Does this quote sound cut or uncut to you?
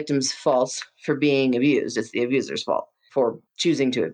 cut